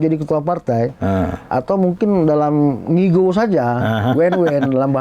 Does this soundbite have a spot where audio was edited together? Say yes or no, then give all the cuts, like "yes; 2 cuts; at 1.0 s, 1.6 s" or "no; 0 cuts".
no; 0 cuts